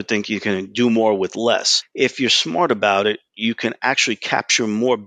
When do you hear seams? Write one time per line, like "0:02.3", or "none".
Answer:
0:01.8